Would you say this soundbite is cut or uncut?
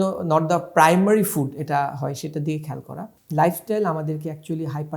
cut